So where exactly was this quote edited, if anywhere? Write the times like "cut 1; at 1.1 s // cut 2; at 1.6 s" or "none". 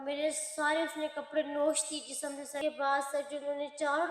none